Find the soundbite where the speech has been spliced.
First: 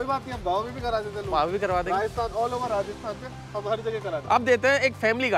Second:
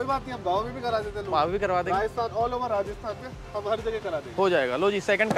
first; 1 cut; at 4.2 s

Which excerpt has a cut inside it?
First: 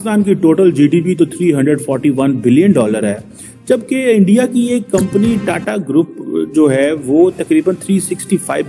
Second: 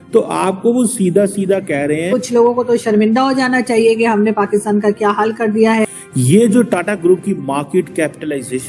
second; 2 cuts; at 2.1 s, 5.8 s

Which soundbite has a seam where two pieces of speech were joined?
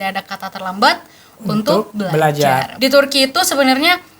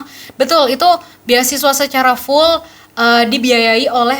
first; 1 cut; at 2.7 s

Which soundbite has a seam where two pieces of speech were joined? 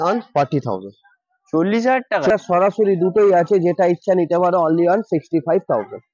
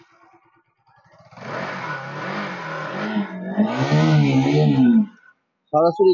first; 1 cut; at 2.3 s

